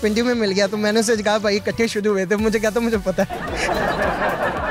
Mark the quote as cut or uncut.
uncut